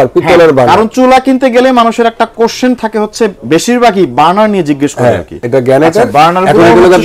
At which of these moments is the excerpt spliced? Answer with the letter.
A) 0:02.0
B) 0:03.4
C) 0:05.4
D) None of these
C